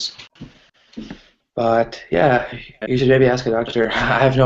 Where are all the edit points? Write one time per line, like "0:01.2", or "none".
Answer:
0:02.6